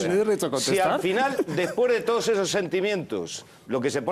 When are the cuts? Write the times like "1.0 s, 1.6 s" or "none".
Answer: 2.4 s